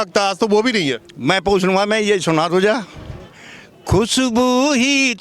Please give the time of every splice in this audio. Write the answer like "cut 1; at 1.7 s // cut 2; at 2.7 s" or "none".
none

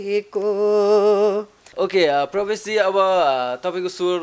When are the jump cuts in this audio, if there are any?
none

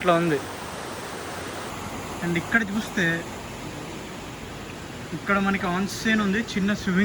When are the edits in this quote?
cut 1; at 1.7 s

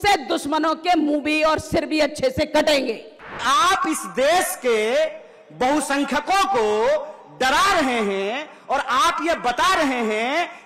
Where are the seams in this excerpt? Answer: cut 1; at 3.4 s

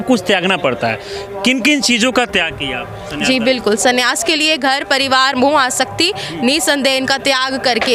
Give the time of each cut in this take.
none

